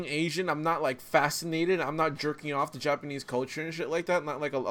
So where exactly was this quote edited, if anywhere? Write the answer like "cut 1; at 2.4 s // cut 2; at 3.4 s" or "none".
none